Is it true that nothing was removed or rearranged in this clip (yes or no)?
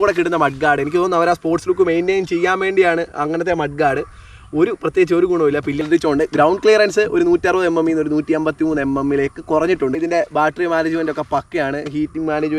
no